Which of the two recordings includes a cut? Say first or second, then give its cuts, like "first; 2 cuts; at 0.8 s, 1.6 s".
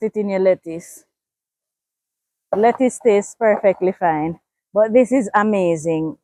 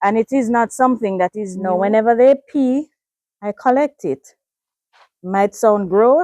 second; 1 cut; at 1.5 s